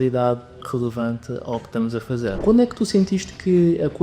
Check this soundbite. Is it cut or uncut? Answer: cut